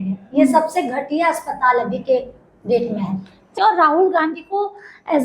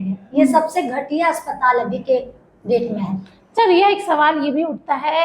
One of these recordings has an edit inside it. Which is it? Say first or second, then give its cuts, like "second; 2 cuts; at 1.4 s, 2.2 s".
first; 1 cut; at 3.4 s